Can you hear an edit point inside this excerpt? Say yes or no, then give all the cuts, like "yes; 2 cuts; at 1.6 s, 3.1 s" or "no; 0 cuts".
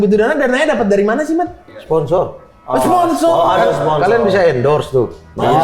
yes; 1 cut; at 1.8 s